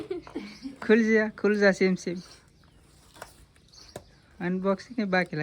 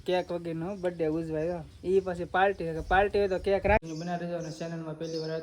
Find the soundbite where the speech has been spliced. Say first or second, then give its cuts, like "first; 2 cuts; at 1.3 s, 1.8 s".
second; 1 cut; at 3.8 s